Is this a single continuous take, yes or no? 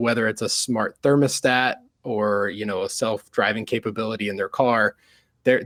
yes